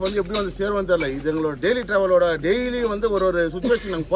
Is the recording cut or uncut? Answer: uncut